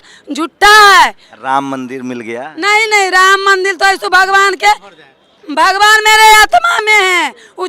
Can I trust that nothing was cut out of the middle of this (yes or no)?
yes